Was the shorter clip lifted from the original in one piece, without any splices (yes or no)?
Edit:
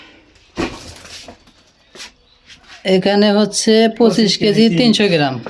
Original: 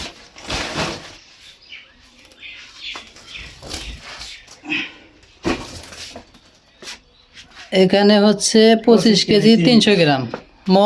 yes